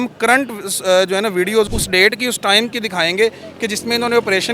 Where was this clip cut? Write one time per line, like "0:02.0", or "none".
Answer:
0:01.7